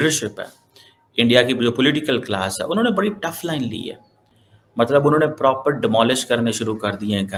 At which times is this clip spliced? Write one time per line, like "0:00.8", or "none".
none